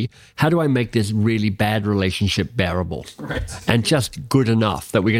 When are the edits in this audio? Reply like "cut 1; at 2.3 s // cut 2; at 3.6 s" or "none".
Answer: none